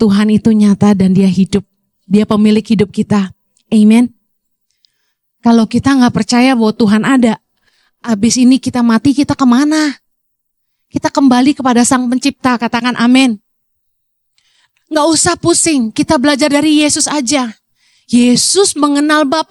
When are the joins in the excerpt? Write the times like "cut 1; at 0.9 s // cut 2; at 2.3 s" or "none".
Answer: none